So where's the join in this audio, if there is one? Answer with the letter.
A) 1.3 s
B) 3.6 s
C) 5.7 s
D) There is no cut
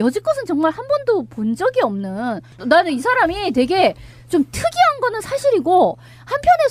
D